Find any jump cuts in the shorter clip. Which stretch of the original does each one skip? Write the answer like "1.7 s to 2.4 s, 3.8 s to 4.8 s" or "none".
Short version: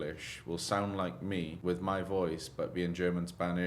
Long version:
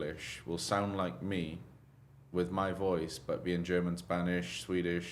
1.5 s to 2.2 s